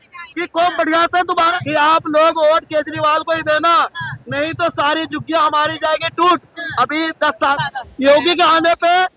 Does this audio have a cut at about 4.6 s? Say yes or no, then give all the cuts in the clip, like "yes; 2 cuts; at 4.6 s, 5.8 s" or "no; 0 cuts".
no; 2 cuts; at 1.5 s, 7.6 s